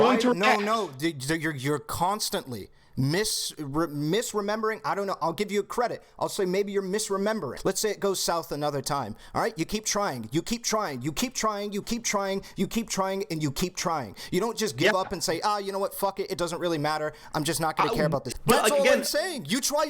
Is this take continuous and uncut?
no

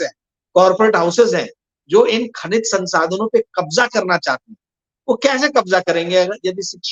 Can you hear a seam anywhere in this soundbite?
no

